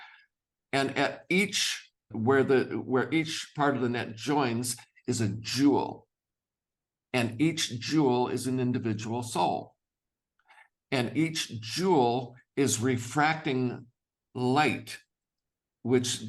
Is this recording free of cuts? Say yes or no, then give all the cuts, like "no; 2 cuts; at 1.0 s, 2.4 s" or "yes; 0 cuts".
no; 1 cut; at 2.1 s